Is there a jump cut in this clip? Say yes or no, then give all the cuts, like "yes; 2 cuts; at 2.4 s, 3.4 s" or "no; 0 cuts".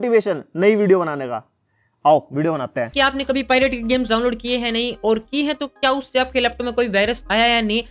no; 0 cuts